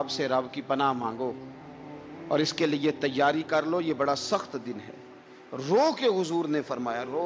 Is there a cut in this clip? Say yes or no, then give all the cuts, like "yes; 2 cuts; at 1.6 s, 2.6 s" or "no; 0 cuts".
no; 0 cuts